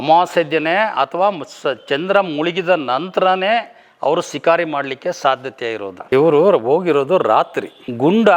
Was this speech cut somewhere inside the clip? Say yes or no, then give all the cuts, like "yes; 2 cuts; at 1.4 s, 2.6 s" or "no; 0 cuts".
yes; 1 cut; at 5.9 s